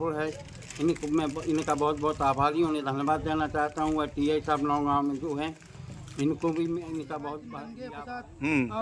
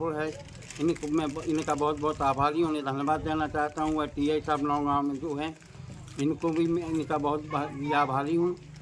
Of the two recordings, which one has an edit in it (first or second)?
first